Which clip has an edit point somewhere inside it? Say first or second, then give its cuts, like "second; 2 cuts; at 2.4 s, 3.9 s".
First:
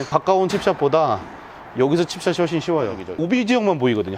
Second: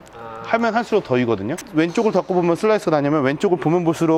first; 1 cut; at 3.1 s